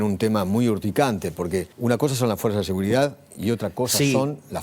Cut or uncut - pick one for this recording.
cut